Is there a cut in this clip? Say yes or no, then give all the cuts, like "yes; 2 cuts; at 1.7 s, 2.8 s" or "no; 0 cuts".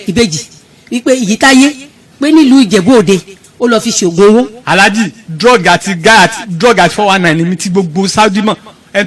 yes; 1 cut; at 4.6 s